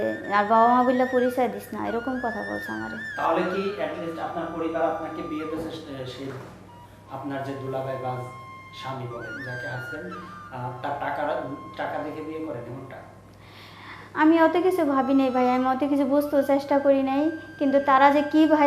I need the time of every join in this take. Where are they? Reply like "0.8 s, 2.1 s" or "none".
none